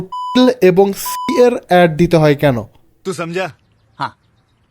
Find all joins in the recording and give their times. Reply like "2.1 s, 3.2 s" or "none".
3.0 s